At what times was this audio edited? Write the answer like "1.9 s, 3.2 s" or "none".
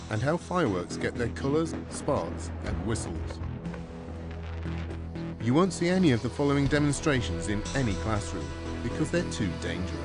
1.7 s

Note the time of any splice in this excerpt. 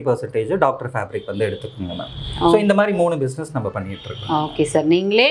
none

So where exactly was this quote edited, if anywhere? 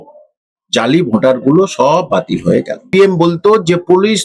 2.9 s

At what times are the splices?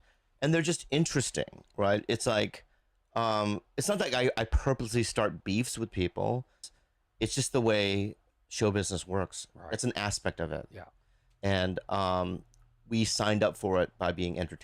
6.7 s

